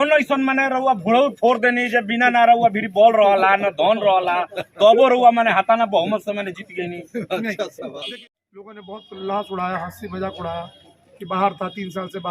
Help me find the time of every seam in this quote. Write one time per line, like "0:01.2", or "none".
0:08.0